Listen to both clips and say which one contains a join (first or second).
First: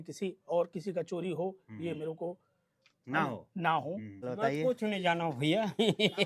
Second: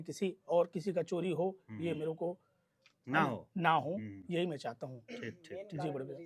first